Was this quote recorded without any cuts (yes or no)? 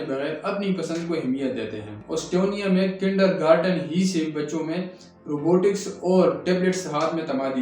no